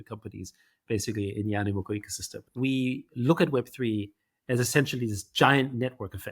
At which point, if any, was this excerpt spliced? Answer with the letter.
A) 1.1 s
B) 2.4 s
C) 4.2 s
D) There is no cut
B